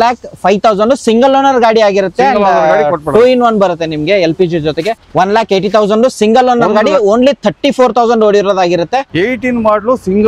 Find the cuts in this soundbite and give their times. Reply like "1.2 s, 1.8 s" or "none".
5.0 s, 9.1 s